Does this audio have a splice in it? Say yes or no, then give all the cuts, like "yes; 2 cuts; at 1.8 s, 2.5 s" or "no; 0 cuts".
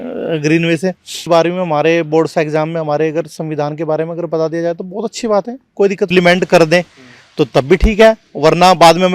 yes; 2 cuts; at 1.3 s, 6.1 s